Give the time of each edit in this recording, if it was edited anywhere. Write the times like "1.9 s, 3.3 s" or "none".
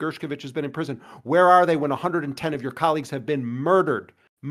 none